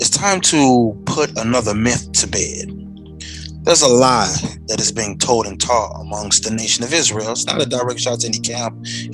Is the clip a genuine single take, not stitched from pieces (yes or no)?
yes